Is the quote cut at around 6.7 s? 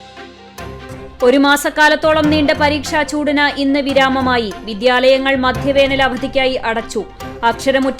no; 1 cut; at 1.1 s

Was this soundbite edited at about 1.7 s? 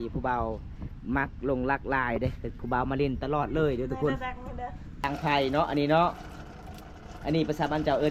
no; 1 cut; at 5.1 s

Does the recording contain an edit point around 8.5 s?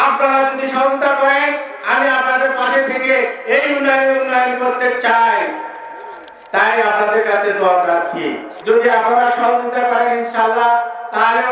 yes; 1 cut; at 8.5 s

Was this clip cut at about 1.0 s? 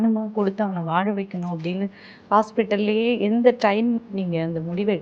no; 0 cuts

